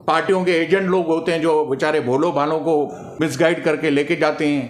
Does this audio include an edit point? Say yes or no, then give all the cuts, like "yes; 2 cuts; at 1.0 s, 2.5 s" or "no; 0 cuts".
yes; 1 cut; at 3.2 s